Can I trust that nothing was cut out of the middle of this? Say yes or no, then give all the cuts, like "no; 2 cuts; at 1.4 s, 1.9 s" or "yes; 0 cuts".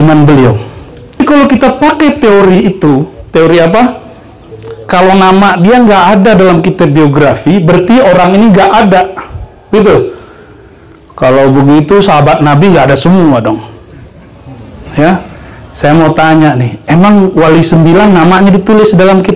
no; 1 cut; at 1.2 s